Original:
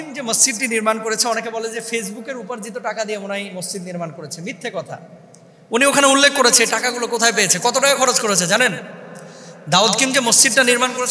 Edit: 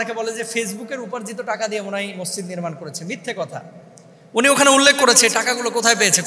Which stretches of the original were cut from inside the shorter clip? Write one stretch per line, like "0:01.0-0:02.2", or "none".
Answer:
none